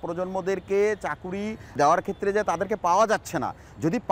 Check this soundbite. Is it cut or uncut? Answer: cut